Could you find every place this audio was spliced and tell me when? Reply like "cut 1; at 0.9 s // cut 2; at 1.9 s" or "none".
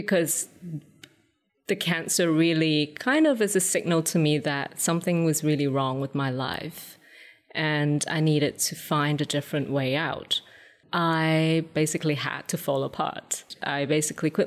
cut 1; at 10.7 s // cut 2; at 11.7 s // cut 3; at 13.5 s